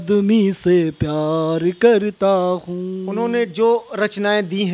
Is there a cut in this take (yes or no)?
yes